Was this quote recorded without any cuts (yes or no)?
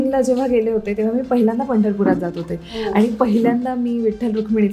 yes